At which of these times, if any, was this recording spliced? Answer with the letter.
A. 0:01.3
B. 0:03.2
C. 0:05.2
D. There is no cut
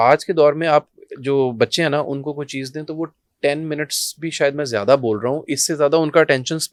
D